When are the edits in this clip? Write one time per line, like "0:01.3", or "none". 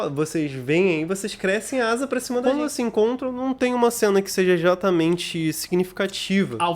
0:02.4